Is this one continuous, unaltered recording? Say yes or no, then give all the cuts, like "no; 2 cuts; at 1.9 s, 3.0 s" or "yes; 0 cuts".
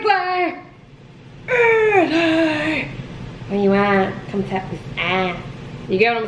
yes; 0 cuts